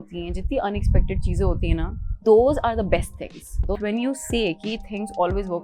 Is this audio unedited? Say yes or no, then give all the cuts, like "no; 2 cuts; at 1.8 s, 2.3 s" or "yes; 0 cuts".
no; 1 cut; at 3.8 s